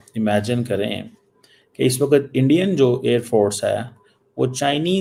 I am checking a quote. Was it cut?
no; 0 cuts

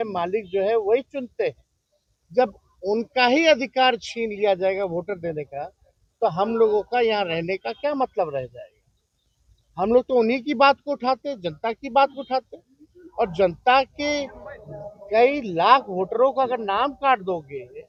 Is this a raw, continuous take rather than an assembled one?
yes; 0 cuts

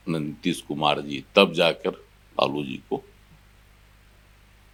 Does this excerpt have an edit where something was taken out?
no; 0 cuts

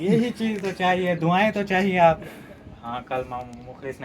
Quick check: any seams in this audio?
yes; 1 cut; at 2.3 s

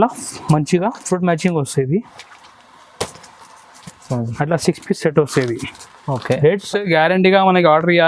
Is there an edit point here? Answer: yes; 1 cut; at 6.6 s

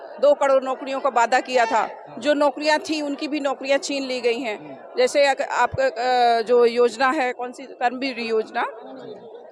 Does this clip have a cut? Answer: no; 0 cuts

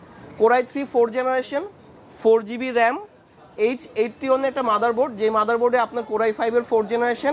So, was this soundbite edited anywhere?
no; 0 cuts

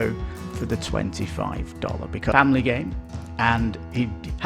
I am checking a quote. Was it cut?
yes; 1 cut; at 2.3 s

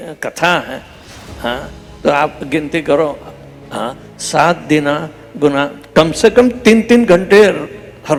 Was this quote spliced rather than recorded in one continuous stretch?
no; 0 cuts

